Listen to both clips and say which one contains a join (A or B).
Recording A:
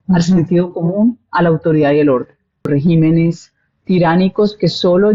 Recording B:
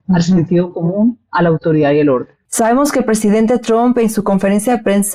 A